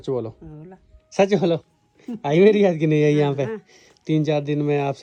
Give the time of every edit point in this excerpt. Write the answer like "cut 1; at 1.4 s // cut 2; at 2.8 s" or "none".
none